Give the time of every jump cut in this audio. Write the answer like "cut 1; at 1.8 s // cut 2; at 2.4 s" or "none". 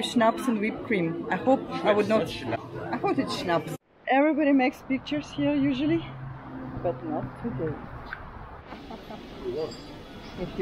cut 1; at 2.7 s // cut 2; at 3.7 s // cut 3; at 8.6 s